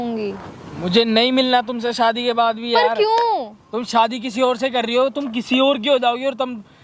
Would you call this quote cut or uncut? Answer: uncut